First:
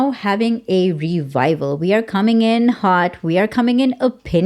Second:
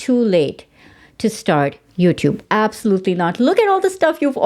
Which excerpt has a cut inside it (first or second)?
second